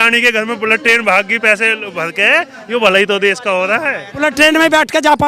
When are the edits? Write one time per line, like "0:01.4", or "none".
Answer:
0:04.2